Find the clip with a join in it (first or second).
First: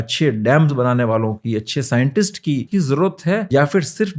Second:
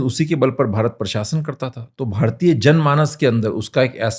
first